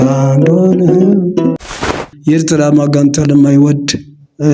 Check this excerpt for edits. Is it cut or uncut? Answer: cut